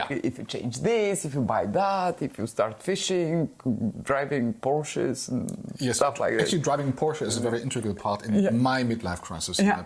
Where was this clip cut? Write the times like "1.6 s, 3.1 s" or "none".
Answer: none